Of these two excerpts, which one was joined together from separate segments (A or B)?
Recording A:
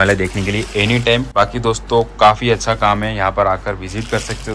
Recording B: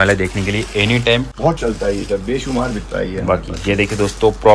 B